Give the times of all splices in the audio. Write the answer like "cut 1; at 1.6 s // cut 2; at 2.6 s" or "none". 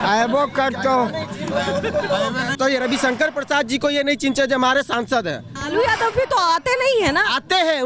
cut 1; at 2.5 s // cut 2; at 5.6 s